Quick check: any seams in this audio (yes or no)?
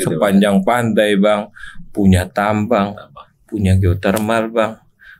no